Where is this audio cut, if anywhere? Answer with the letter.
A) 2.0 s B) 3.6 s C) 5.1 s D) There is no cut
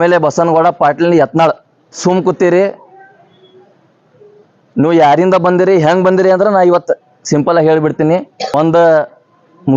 A